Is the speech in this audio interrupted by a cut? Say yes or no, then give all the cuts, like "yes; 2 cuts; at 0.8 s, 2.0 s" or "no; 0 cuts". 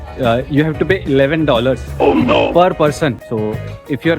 yes; 1 cut; at 3.2 s